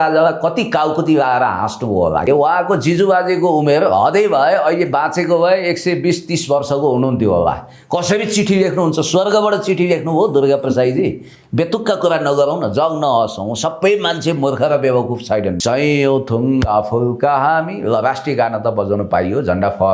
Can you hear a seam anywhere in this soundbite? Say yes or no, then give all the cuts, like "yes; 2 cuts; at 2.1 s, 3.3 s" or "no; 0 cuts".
yes; 2 cuts; at 2.3 s, 15.6 s